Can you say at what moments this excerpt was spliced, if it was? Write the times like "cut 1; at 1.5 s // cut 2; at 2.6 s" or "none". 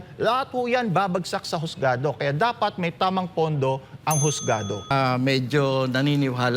cut 1; at 4.9 s